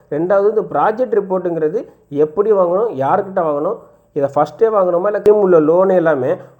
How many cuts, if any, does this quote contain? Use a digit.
1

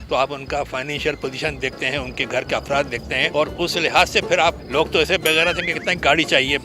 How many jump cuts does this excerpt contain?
0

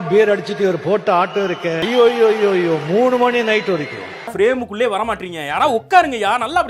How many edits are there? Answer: 2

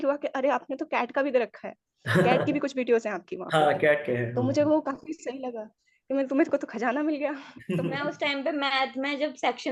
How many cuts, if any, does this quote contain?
1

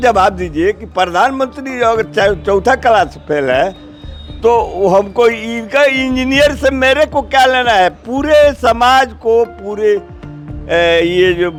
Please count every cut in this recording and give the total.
0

